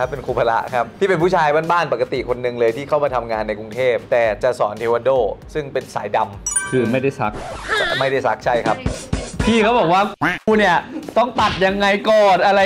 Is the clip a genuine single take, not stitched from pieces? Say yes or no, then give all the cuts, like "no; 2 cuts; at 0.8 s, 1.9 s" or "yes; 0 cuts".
yes; 0 cuts